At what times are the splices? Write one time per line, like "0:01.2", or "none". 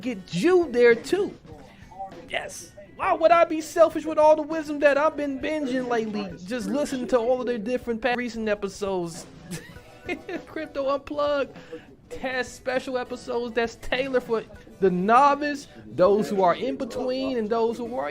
0:08.1